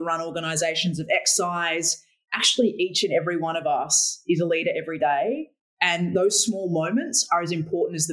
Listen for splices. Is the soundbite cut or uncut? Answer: uncut